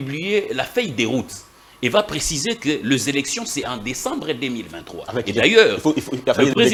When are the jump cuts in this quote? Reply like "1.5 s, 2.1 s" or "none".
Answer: none